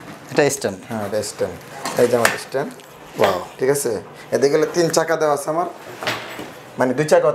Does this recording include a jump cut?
no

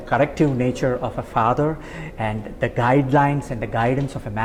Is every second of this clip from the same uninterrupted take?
yes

